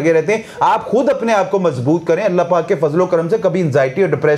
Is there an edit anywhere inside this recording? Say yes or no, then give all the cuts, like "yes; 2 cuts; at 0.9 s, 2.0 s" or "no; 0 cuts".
no; 0 cuts